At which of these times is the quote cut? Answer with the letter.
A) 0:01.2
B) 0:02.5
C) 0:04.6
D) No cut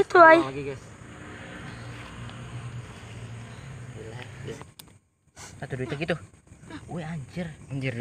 C